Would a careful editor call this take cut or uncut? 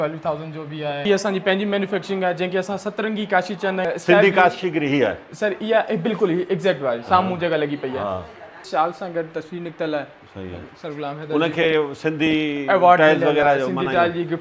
cut